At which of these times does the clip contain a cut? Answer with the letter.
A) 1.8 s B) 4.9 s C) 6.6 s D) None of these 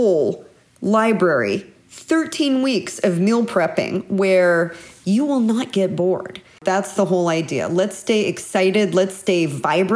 C